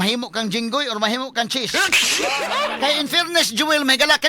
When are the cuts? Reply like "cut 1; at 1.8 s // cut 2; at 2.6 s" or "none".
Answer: cut 1; at 2.4 s